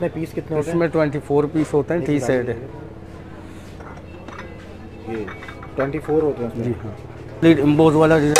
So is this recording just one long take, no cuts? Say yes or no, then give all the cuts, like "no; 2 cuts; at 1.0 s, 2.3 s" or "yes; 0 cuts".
no; 1 cut; at 7.4 s